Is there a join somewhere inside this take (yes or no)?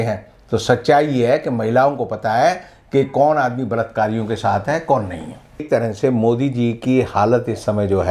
yes